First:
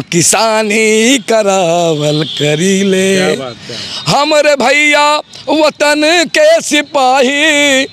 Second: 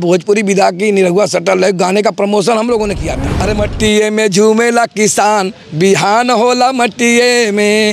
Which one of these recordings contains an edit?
second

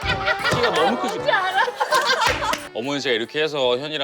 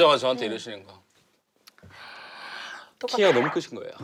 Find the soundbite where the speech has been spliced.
first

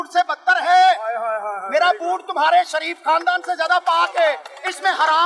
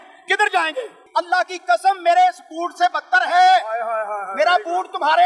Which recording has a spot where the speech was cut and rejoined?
second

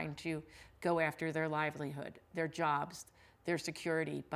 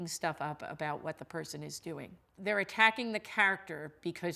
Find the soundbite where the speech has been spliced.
second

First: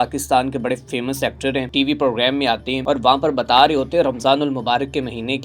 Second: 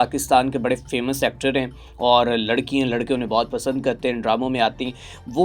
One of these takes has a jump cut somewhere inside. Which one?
first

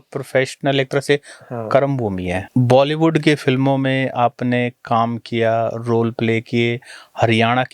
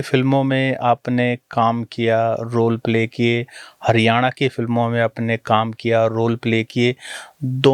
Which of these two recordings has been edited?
first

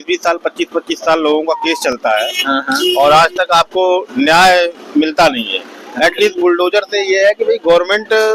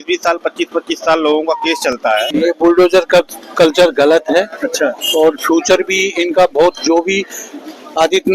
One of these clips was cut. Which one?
second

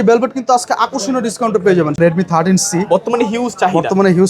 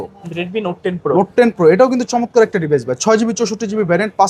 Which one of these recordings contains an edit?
first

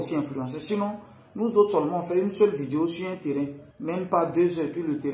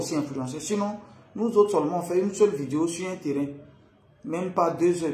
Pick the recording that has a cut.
first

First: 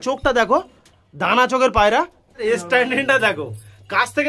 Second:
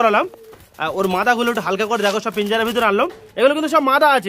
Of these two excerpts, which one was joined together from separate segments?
first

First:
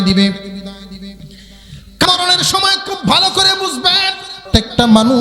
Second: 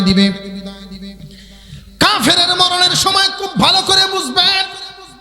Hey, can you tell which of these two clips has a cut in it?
first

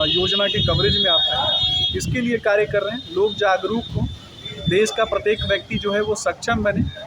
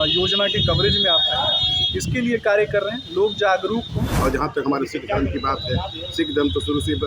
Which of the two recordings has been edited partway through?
second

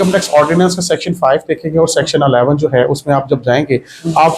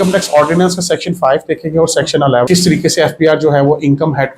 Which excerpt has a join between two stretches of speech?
second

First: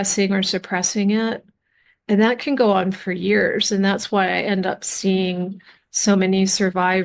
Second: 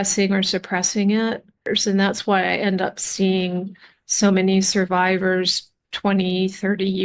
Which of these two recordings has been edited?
second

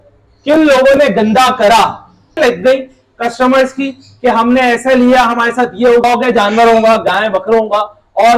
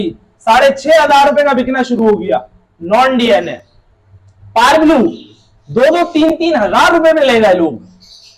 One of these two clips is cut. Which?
first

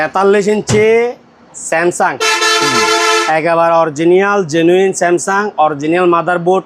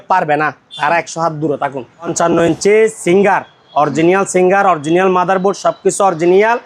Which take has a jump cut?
second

